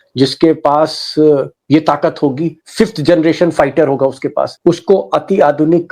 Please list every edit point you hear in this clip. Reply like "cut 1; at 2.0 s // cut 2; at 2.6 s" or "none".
cut 1; at 4.5 s